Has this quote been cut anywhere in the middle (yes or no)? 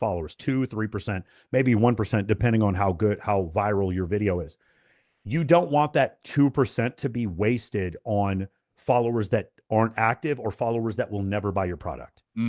yes